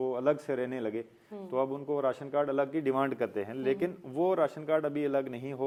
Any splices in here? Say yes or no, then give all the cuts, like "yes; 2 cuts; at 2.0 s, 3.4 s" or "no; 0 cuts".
no; 0 cuts